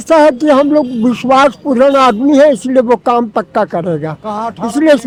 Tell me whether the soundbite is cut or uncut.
uncut